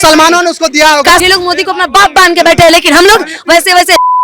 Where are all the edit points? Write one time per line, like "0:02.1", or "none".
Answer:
0:01.2